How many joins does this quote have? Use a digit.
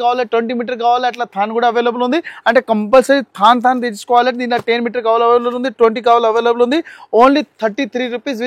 0